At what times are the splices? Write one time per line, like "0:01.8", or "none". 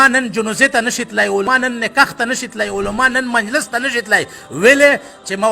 0:01.5